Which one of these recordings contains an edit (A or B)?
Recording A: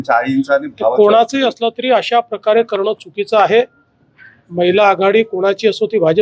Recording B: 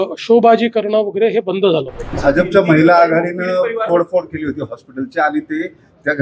B